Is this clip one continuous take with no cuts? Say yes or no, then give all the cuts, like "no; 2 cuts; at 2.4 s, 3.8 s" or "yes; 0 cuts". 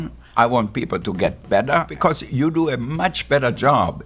no; 1 cut; at 1.9 s